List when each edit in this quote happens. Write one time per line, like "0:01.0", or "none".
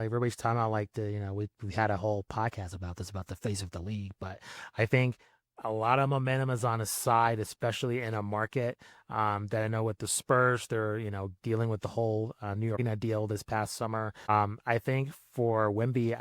0:12.8
0:14.3